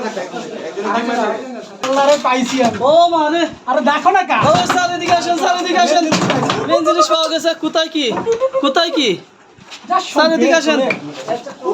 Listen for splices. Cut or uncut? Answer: cut